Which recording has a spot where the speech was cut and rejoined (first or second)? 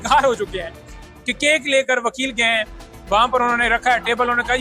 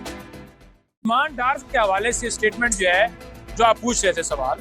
second